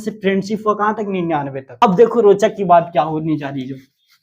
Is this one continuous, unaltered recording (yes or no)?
no